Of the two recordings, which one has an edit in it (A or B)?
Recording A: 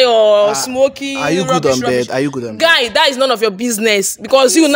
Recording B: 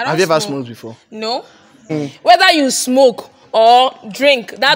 B